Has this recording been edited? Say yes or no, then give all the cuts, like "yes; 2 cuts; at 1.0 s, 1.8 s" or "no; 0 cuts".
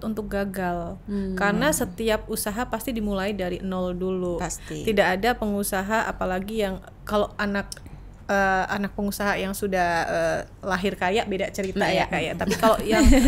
no; 0 cuts